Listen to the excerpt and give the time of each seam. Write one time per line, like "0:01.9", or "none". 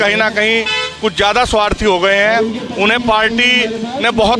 none